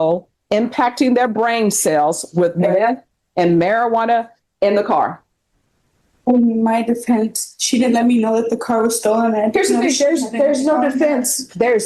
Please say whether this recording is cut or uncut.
uncut